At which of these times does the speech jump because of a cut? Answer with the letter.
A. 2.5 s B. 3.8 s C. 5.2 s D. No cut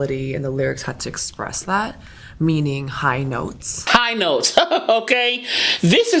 B